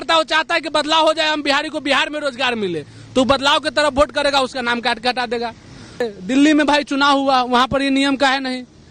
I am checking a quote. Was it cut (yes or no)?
yes